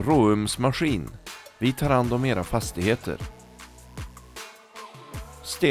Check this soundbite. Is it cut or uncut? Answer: uncut